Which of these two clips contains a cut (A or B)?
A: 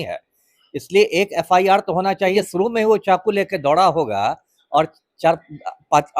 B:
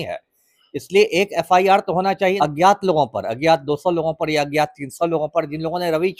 A